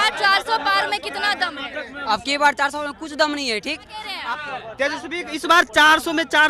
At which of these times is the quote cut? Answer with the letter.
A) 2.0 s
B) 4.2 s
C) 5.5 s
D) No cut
B